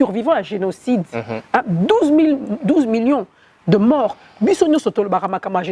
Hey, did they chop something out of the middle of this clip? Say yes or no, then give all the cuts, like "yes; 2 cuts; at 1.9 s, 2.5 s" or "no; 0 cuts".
no; 0 cuts